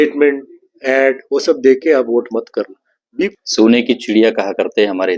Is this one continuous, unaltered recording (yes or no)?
no